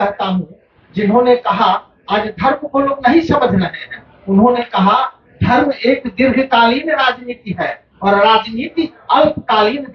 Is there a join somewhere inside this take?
no; 0 cuts

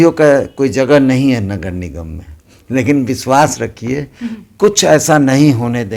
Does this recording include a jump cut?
no; 0 cuts

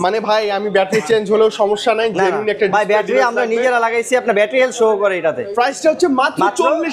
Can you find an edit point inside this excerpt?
no; 0 cuts

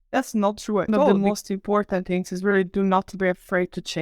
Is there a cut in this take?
yes; 1 cut; at 1.1 s

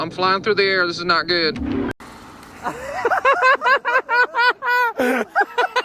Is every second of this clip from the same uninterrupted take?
yes; 0 cuts

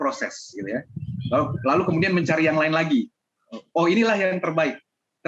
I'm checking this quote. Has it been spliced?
no; 0 cuts

